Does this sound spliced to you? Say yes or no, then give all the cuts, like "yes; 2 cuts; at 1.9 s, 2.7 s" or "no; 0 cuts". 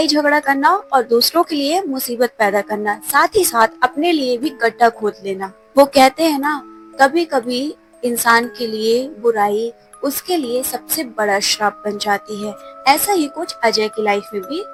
no; 0 cuts